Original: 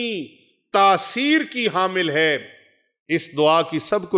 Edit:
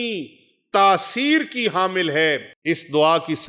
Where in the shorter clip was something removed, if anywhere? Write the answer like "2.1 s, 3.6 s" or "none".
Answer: 2.5 s